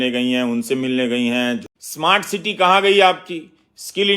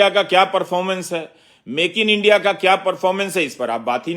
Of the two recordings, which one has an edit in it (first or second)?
first